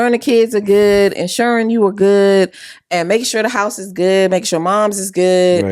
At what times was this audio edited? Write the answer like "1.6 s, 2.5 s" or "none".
none